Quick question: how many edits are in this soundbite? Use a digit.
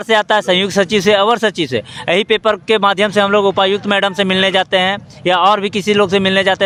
0